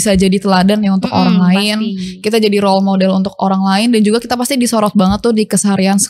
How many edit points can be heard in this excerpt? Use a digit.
0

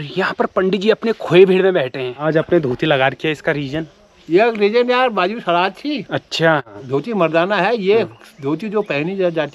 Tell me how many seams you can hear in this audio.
2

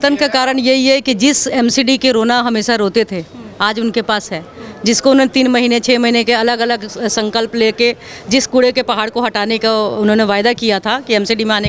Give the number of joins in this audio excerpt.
0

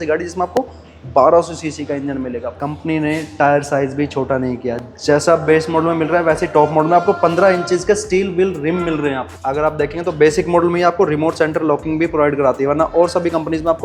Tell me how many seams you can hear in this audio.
2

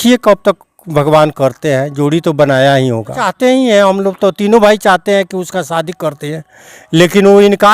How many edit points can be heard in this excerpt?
1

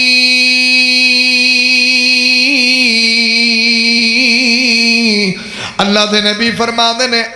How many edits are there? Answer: 0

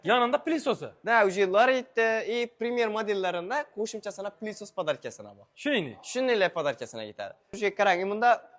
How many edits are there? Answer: 1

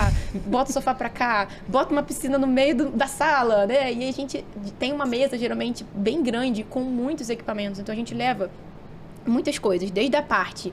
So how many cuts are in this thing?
0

